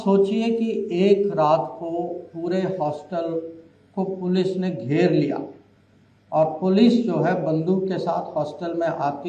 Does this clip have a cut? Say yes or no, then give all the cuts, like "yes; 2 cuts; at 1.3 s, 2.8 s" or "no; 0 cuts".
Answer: no; 0 cuts